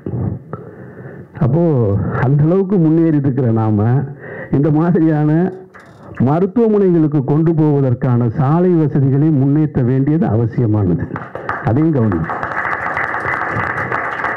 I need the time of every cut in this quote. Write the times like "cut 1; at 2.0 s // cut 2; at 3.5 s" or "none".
none